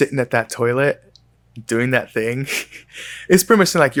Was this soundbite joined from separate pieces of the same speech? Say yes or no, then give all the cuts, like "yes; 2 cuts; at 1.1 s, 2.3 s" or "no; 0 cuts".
no; 0 cuts